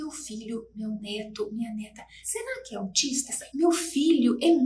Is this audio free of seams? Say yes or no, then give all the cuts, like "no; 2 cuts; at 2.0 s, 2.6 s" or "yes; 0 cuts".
no; 1 cut; at 3.2 s